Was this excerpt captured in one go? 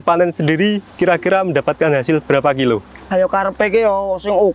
yes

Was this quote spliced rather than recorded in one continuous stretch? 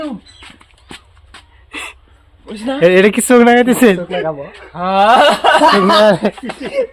no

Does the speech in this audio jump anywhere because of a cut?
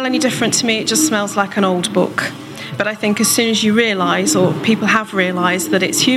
no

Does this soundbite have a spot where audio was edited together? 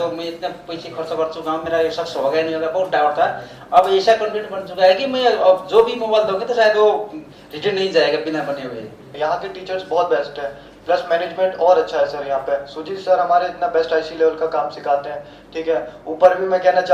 yes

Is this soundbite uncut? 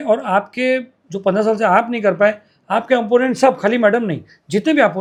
yes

